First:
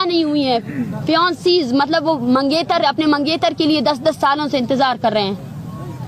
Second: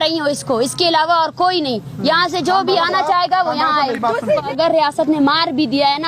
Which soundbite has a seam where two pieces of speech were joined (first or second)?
second